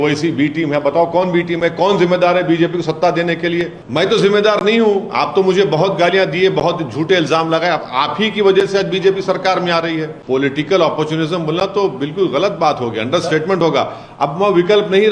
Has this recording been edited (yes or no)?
yes